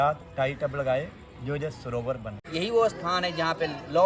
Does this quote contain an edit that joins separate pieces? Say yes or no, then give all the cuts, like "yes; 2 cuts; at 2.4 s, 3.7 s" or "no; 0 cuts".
yes; 1 cut; at 2.4 s